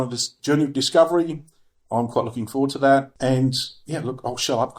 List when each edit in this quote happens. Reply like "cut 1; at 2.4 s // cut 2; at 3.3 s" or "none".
cut 1; at 3.1 s